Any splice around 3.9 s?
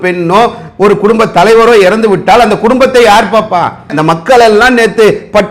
yes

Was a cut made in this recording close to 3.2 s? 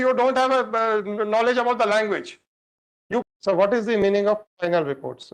yes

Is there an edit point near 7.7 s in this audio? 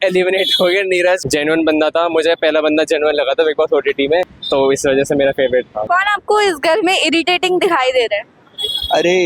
no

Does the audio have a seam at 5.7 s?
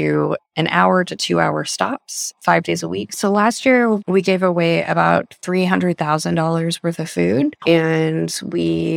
no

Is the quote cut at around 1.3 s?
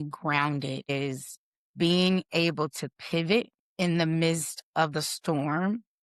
no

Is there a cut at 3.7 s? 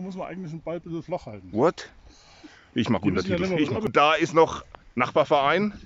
no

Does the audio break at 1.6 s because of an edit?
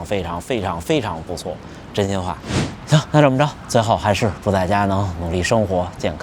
no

